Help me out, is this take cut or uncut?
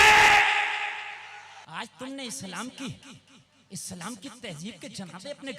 cut